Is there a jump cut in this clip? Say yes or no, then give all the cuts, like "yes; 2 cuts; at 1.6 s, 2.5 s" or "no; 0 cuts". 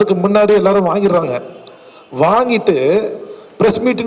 no; 0 cuts